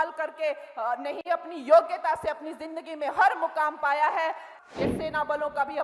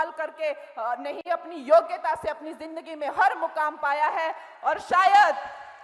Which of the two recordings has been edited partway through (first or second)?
first